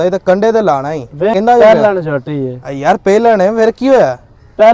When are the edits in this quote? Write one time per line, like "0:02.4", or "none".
0:01.3